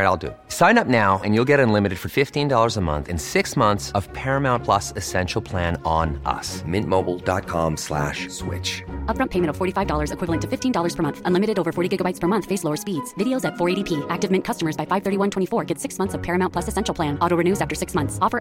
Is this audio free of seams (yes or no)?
yes